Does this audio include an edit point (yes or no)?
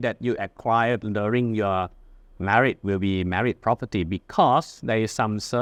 no